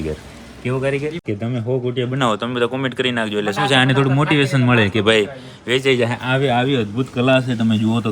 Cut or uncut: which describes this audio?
cut